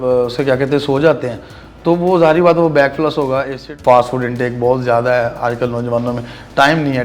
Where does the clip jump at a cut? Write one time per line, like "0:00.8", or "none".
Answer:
0:03.6

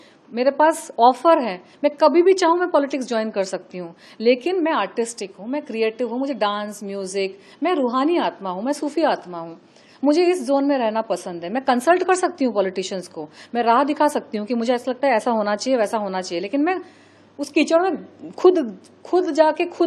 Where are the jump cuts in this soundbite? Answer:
none

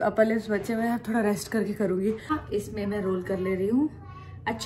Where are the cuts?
0:02.3

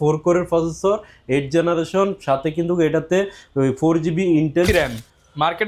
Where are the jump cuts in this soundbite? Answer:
0:04.7

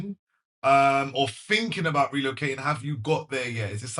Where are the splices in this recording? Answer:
none

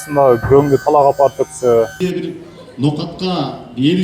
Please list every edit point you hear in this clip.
0:01.9

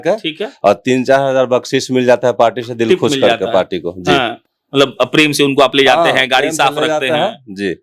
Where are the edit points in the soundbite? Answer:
none

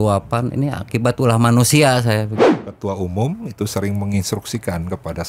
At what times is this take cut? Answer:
0:02.5

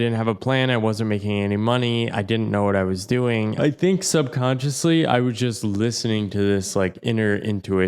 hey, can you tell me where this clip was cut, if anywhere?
0:03.5

